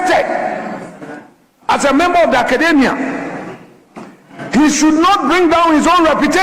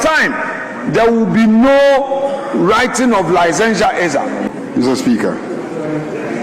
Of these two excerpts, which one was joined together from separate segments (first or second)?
second